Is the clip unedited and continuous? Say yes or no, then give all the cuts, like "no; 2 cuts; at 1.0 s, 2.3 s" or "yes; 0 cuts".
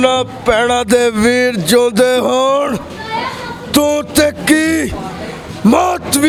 yes; 0 cuts